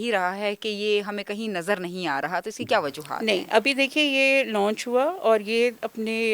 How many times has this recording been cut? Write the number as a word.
zero